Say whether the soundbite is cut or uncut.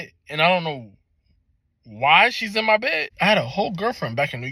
cut